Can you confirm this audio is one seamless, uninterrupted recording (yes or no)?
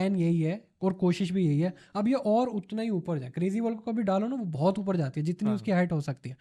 yes